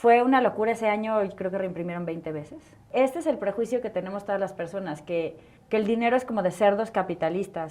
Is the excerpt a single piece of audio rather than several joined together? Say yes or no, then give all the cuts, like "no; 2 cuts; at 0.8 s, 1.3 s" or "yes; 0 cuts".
no; 1 cut; at 2.8 s